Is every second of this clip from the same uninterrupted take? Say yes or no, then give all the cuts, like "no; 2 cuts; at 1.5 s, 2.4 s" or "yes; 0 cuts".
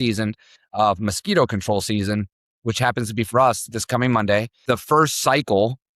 no; 1 cut; at 4.5 s